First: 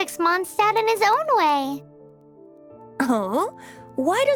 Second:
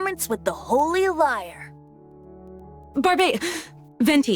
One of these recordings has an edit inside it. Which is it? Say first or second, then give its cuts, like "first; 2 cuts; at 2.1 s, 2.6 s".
second; 2 cuts; at 1.7 s, 2.9 s